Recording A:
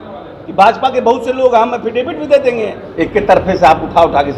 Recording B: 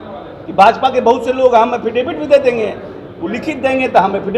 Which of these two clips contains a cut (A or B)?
A